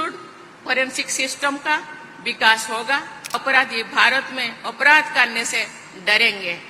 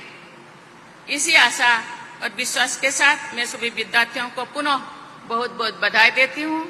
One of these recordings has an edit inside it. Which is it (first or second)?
first